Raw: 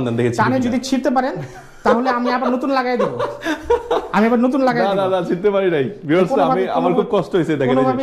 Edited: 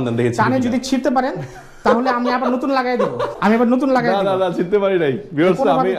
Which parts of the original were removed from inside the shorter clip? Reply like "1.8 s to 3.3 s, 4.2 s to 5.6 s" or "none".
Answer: 3.3 s to 4.1 s